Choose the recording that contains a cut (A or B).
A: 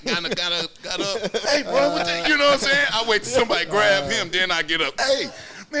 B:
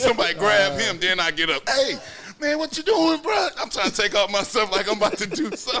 A